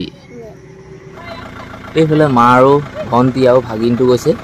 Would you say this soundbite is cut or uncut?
cut